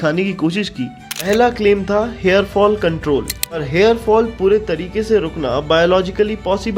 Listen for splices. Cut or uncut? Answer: cut